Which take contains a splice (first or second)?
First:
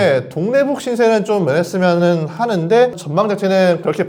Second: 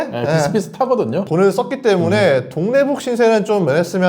second